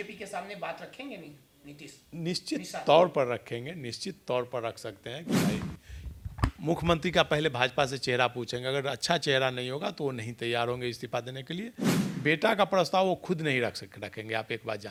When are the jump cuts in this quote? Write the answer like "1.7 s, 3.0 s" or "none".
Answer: none

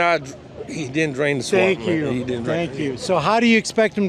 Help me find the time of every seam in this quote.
none

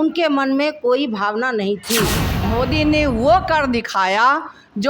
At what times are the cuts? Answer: 2.3 s

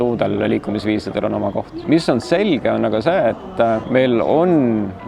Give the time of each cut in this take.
1.8 s, 3.8 s

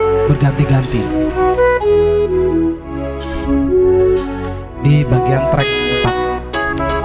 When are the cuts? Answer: none

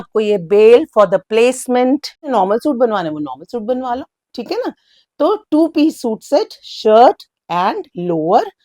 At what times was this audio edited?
2.3 s

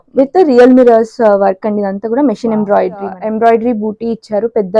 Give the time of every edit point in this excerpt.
3.2 s

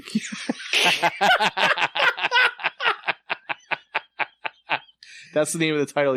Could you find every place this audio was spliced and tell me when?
none

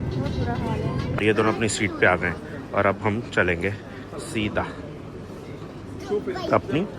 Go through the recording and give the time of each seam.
1.2 s

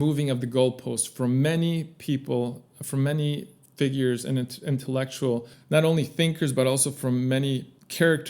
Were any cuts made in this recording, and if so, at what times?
none

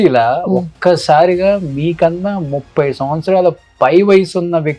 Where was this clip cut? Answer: none

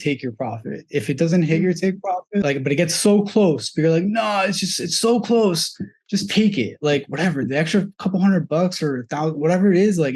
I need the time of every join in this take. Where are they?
2.4 s

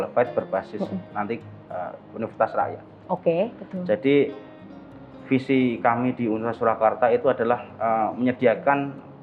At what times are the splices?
none

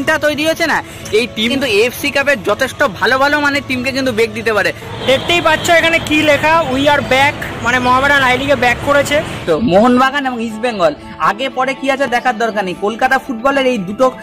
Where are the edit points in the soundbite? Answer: 1.5 s, 4.9 s, 9.4 s

